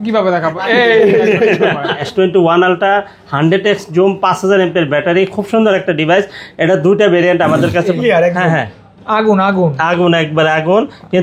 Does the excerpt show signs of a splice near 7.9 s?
yes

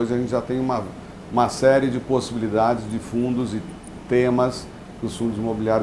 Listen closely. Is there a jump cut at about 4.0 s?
no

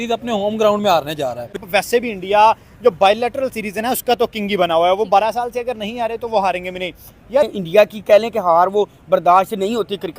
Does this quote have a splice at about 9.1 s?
no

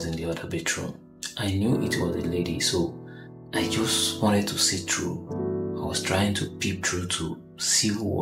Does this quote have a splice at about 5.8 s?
no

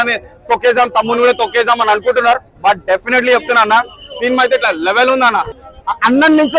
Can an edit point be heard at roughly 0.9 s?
no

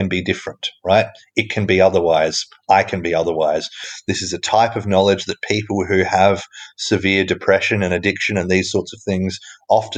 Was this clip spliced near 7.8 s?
no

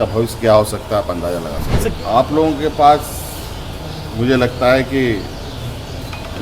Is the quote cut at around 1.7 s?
yes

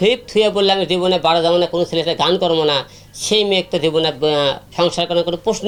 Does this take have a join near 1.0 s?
no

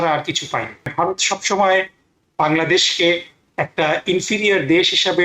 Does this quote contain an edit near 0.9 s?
yes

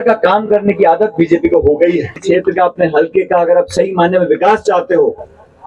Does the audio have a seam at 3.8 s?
no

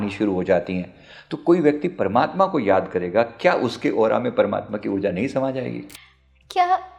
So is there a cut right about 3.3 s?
no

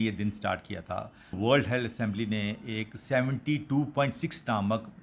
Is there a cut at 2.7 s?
no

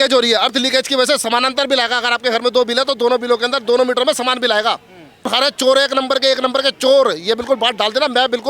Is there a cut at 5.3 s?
yes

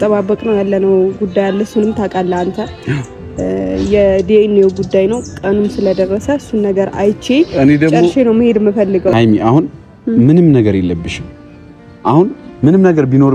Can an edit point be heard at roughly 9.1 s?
yes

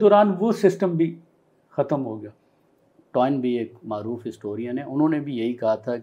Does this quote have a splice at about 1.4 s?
no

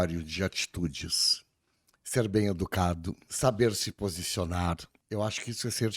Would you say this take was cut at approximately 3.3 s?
yes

